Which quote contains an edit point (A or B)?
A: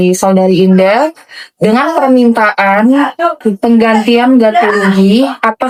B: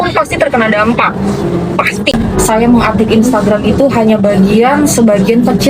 B